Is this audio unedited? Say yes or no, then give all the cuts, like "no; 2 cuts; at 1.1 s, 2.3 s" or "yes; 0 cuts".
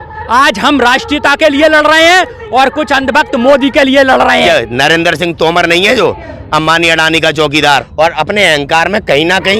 no; 2 cuts; at 4.5 s, 7.7 s